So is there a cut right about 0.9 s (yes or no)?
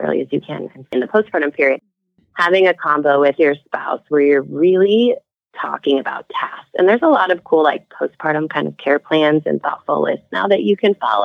yes